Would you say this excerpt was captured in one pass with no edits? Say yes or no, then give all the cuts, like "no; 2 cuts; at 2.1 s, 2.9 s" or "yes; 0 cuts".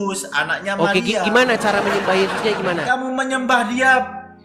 no; 1 cut; at 2.8 s